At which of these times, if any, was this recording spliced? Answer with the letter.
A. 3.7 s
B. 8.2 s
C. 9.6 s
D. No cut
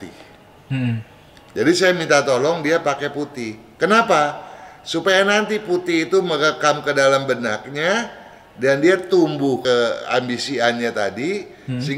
C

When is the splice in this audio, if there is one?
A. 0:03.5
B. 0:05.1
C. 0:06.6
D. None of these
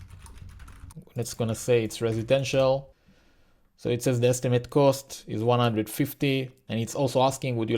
C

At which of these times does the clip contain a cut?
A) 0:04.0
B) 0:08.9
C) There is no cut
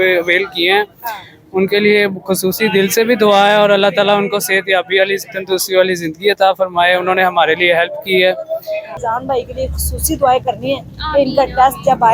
B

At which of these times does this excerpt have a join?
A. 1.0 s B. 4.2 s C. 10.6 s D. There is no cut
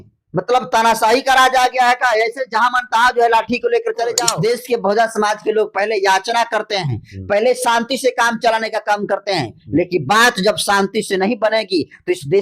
B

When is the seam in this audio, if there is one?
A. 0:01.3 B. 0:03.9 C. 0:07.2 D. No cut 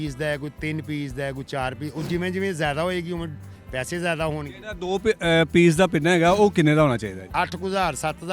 C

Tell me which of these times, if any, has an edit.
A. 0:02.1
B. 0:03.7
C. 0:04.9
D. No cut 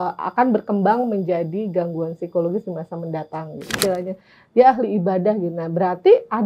B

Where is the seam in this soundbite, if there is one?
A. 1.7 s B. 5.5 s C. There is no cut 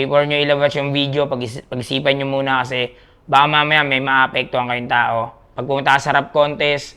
B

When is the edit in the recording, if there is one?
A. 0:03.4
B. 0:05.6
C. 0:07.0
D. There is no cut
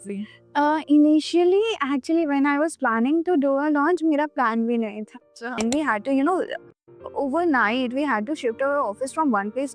B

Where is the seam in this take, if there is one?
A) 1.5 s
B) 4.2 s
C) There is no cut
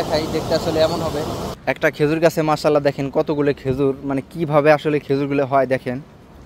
A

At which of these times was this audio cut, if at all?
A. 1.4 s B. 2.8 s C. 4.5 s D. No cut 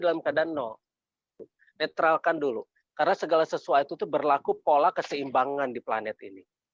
A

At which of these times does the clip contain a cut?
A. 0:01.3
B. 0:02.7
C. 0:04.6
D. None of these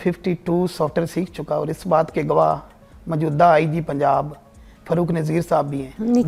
D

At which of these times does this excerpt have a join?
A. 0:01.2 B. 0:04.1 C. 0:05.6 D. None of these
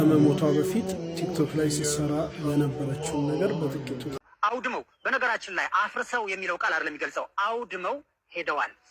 B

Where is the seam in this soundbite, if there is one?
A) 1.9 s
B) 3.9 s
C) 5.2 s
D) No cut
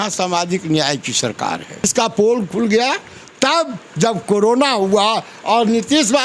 A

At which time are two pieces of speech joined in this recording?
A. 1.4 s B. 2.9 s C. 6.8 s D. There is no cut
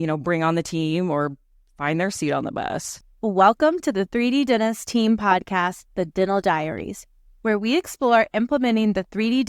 B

